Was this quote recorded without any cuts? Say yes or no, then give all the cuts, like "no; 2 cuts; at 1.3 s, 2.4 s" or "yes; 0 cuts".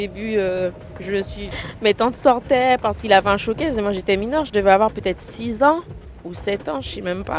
no; 1 cut; at 1.4 s